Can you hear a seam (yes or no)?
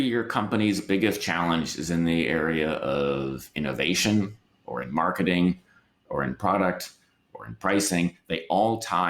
no